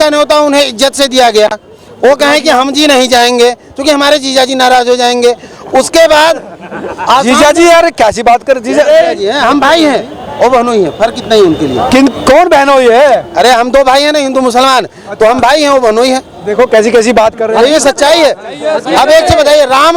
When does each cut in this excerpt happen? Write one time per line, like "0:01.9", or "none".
none